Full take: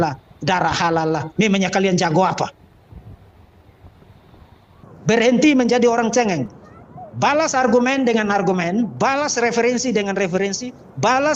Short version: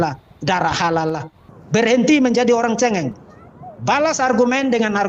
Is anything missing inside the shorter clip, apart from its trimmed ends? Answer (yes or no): yes